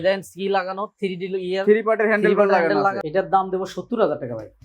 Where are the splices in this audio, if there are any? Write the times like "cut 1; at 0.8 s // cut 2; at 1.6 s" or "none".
cut 1; at 3.0 s